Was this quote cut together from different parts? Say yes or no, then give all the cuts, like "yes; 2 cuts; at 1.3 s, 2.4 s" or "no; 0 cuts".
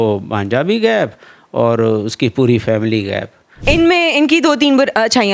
yes; 1 cut; at 3.5 s